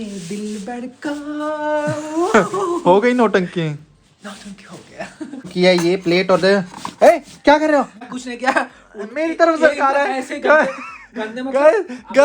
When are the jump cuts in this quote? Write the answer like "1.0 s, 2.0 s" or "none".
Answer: 5.5 s, 8.0 s